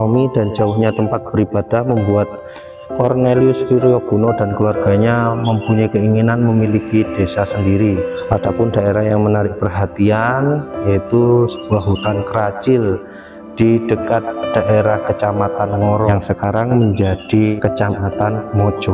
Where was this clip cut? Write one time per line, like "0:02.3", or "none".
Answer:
0:08.1
0:16.1
0:17.5